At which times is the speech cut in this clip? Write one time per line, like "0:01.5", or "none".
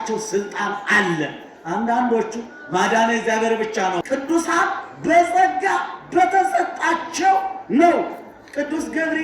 0:04.0